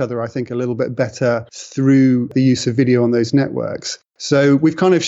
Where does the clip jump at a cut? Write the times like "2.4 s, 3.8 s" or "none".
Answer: 1.6 s